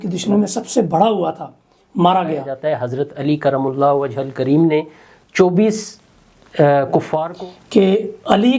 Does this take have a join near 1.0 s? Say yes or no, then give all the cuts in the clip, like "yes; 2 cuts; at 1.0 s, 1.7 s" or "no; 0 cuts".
no; 2 cuts; at 2.5 s, 7.3 s